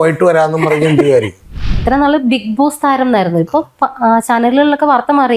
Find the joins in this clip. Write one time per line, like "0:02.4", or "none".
0:01.8

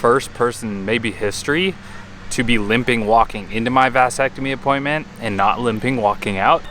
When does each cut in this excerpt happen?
none

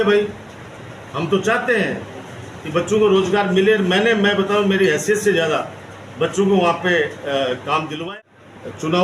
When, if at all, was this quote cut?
0:08.1

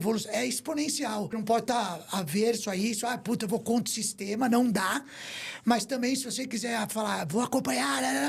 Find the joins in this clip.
0:01.3

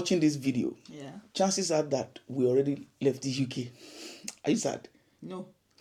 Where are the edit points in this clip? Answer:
none

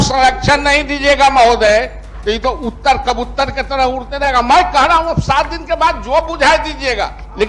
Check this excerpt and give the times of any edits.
none

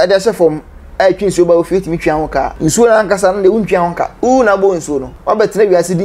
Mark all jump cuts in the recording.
0:02.5
0:04.1
0:05.1

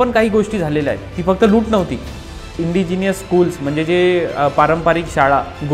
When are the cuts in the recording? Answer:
0:02.6

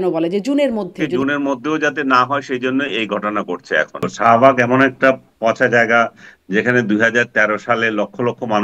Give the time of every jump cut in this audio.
0:01.1
0:04.1

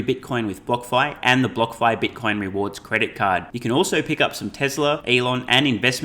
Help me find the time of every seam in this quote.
0:05.0

